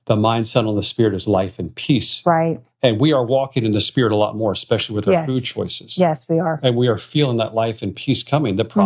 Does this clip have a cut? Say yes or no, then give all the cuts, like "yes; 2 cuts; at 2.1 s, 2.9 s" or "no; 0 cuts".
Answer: no; 0 cuts